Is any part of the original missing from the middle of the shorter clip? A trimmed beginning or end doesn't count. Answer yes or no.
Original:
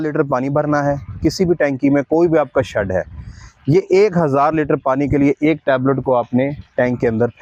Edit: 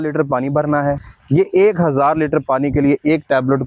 yes